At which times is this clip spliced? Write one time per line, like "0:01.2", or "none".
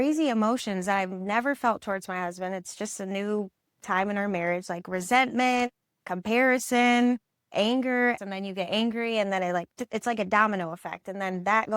0:07.5
0:08.2